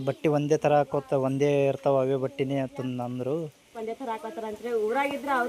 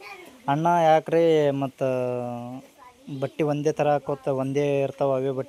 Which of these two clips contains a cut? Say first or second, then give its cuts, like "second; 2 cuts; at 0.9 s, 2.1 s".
first; 1 cut; at 3.8 s